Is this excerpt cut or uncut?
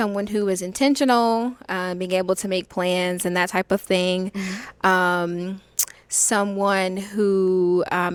uncut